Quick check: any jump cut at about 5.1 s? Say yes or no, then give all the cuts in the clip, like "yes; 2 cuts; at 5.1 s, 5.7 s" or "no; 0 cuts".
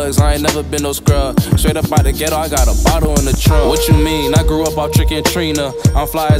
no; 0 cuts